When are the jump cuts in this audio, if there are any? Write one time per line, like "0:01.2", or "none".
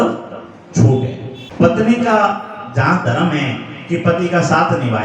0:01.4